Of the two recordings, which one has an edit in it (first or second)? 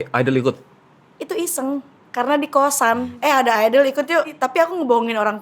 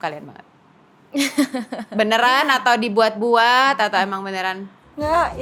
first